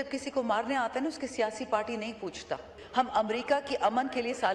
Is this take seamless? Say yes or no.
no